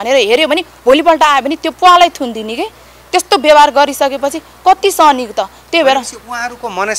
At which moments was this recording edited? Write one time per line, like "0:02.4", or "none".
none

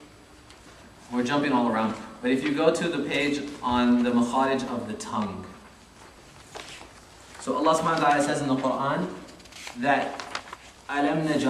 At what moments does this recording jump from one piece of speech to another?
0:06.4

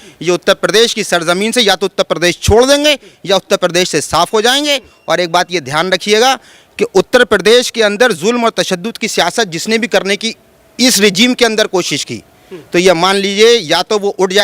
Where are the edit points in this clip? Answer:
none

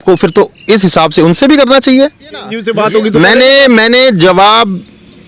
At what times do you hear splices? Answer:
0:02.6

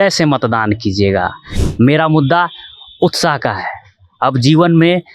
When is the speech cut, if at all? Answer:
0:01.5

